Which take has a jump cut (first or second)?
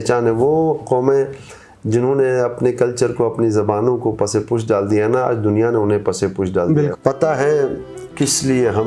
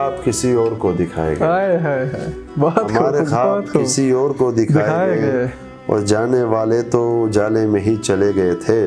first